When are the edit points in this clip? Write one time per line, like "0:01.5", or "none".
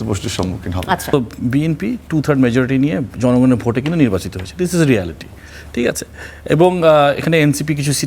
0:01.1